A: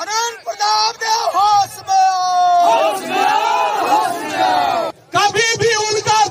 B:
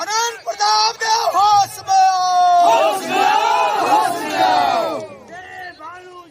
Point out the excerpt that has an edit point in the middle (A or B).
A